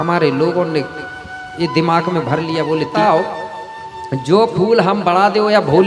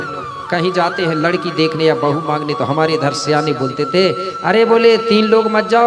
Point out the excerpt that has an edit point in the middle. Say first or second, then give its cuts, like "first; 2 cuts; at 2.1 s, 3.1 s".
first; 1 cut; at 2.9 s